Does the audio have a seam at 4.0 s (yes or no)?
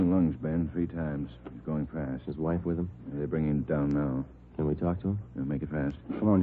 yes